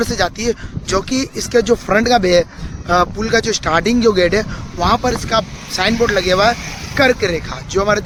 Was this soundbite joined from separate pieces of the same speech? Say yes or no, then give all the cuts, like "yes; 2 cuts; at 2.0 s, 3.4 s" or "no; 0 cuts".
no; 0 cuts